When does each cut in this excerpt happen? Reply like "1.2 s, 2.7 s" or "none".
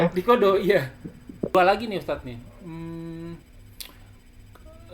1.4 s